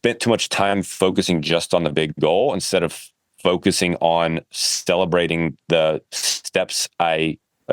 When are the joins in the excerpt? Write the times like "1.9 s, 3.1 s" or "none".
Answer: none